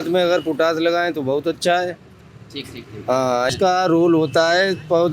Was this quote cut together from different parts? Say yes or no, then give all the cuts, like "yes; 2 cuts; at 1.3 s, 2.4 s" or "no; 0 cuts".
yes; 1 cut; at 3.5 s